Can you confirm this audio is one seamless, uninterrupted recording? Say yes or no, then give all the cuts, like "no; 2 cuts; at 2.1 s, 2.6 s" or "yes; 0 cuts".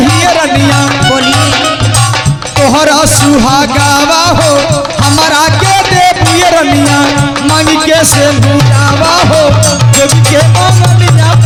yes; 0 cuts